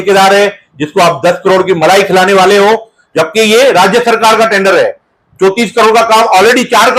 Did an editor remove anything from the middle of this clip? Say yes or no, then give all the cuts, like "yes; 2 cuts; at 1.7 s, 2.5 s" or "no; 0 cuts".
no; 0 cuts